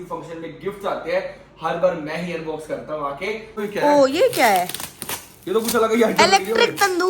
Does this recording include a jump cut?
yes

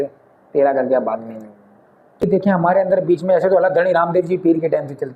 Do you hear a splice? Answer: yes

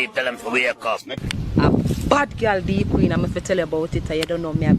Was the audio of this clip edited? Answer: yes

